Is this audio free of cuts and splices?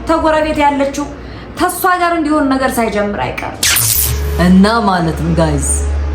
no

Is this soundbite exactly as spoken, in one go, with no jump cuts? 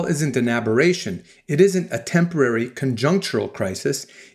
yes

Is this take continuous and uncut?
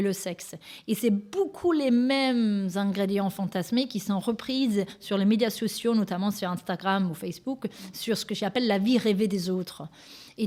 yes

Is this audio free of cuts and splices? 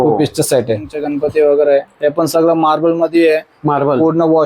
no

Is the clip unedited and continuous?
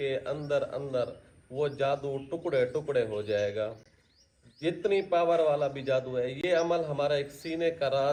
yes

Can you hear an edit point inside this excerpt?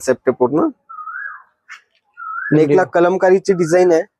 no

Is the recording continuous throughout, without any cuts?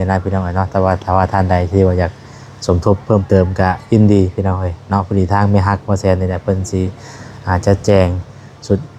yes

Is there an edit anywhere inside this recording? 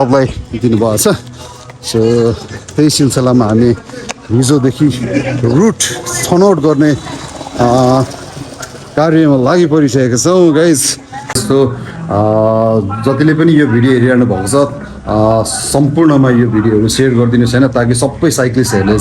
yes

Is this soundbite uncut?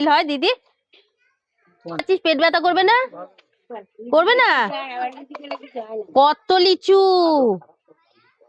no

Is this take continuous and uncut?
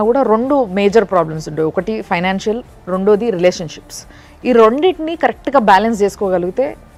yes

